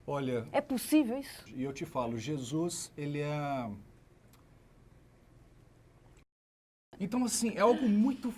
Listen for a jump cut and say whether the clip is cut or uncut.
cut